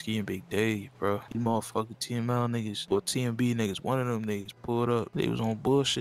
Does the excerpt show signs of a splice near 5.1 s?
yes; 3 cuts; at 1.3 s, 2.8 s, 5.1 s

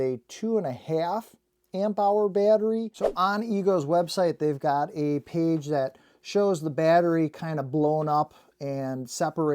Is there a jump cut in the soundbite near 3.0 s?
yes; 1 cut; at 3.0 s

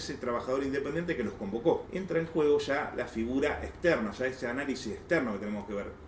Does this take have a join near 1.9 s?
yes; 1 cut; at 1.9 s

